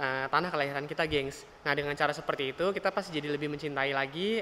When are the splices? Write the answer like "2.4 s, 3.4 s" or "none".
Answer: 1.5 s